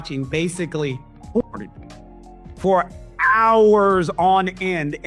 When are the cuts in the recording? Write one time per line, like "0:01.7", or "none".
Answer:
none